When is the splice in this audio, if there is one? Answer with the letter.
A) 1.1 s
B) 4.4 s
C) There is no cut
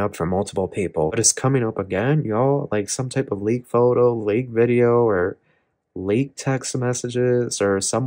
A